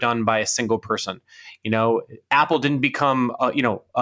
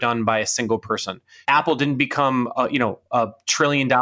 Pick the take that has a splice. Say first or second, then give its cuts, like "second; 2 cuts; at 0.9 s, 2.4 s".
second; 1 cut; at 1.3 s